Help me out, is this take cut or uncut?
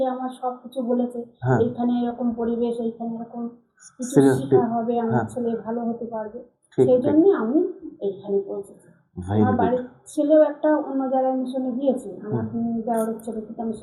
uncut